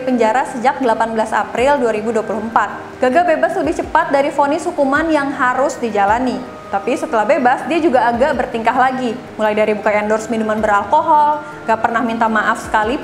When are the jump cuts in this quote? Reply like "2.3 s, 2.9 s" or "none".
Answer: 2.8 s, 6.5 s